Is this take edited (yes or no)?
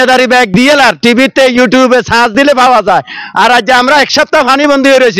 no